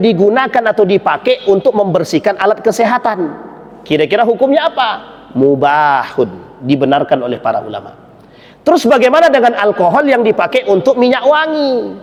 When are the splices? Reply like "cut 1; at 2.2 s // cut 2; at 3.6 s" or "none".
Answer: none